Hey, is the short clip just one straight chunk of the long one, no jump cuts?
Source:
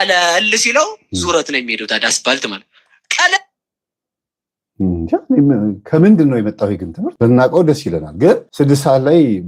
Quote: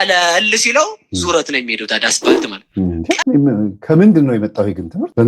no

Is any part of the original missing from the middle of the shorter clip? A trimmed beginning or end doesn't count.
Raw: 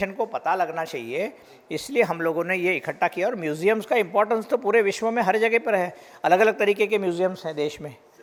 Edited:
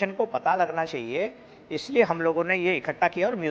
no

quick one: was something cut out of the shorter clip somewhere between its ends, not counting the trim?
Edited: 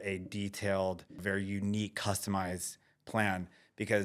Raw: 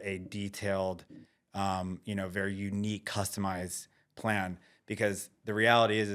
yes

